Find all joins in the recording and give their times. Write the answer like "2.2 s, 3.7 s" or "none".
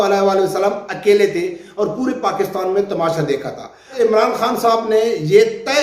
3.9 s